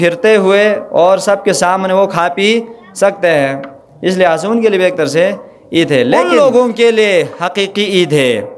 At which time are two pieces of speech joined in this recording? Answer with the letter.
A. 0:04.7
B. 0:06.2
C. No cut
B